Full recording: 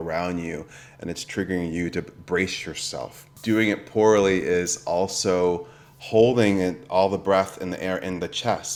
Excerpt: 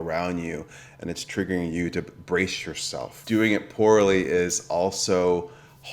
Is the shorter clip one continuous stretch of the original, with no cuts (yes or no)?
no